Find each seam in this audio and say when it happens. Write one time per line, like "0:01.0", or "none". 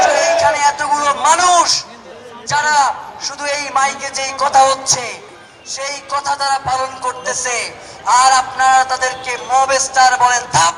none